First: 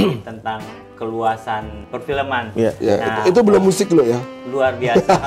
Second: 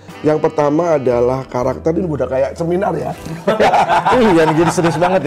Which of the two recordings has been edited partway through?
first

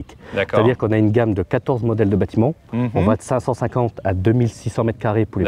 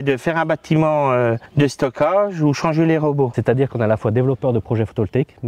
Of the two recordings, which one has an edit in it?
second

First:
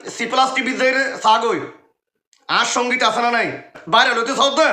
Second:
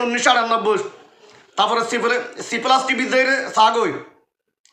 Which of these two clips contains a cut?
first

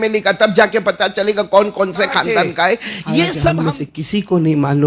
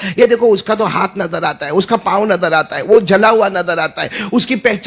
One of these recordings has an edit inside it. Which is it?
first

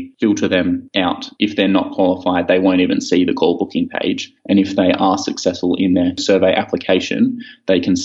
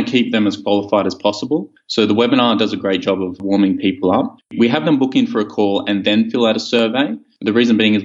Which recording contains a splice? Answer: first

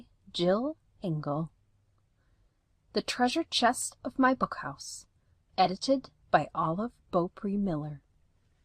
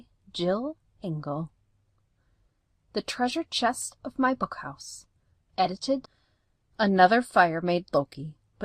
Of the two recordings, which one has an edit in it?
first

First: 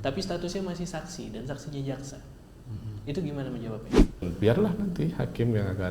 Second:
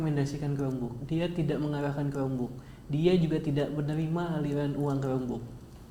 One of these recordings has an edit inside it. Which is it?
first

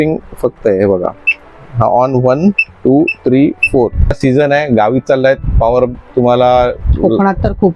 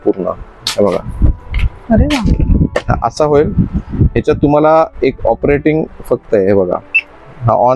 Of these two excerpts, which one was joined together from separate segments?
first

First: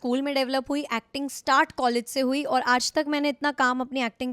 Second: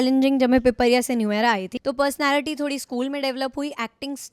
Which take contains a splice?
second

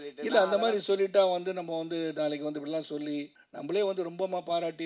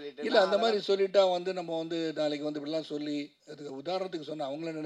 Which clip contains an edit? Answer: first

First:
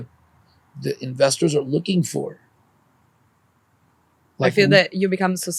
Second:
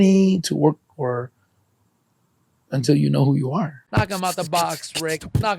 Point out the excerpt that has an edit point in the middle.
second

